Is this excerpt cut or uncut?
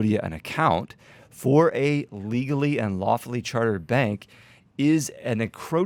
uncut